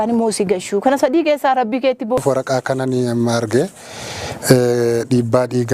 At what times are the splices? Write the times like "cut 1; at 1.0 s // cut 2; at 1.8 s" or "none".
cut 1; at 2.2 s